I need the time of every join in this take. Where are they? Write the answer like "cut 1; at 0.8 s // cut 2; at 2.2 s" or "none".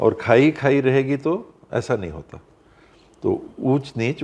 none